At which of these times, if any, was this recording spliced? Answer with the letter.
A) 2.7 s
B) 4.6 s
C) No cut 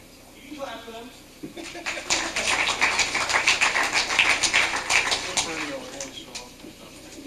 C